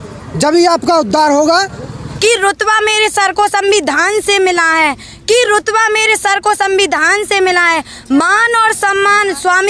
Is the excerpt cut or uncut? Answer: cut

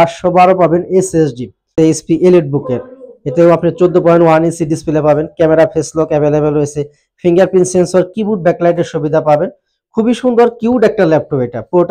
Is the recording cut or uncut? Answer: cut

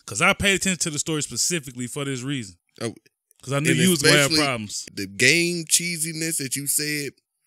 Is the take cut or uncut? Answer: cut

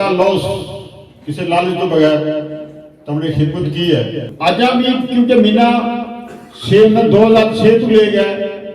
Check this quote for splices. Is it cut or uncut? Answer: cut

